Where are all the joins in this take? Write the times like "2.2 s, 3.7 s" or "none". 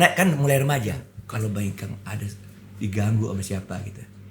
1.1 s